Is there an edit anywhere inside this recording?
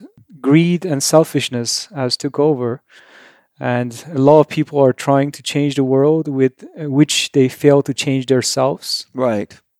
no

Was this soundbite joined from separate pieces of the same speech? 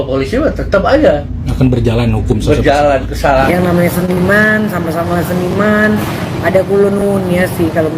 yes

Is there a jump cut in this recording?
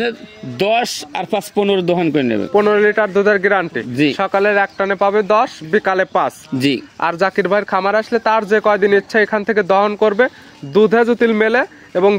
no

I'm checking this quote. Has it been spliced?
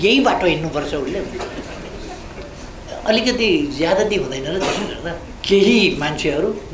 yes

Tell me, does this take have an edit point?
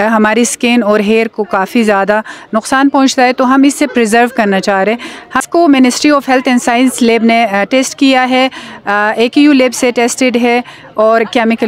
yes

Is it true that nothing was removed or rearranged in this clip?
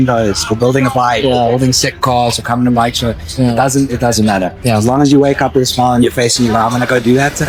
yes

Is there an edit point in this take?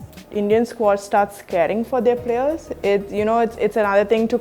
no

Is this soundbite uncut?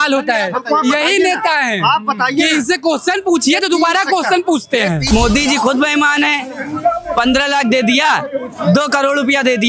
no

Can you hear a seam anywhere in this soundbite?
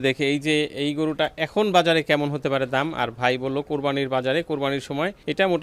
no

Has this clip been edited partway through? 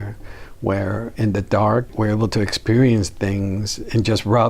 yes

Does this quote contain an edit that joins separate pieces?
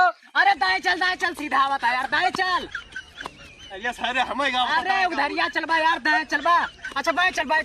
no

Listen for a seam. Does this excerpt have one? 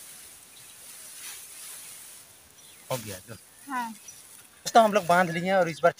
yes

